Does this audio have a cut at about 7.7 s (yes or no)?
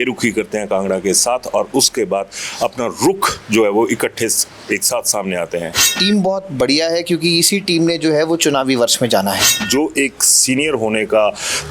no